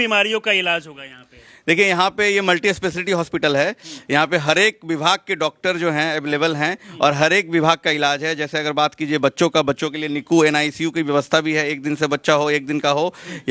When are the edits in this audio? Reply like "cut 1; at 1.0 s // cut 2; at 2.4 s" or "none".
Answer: none